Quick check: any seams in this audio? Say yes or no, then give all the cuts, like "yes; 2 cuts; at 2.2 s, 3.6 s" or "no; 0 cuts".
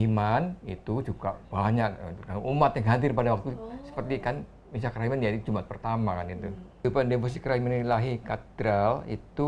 yes; 1 cut; at 6.8 s